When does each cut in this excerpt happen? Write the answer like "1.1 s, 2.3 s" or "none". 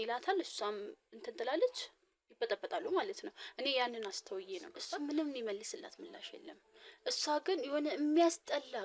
4.8 s